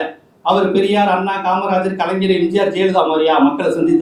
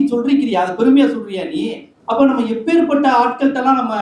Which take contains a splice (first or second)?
second